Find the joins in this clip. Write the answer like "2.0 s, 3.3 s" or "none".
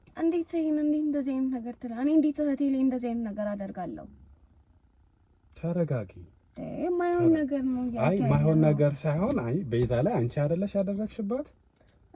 none